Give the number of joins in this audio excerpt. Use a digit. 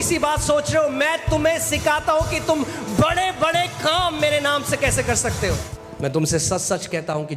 1